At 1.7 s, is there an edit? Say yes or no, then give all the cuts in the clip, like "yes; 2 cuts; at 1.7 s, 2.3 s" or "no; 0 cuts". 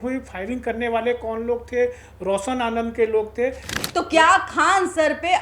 no; 1 cut; at 3.8 s